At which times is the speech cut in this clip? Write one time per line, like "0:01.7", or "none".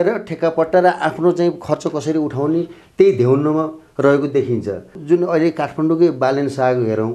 0:05.0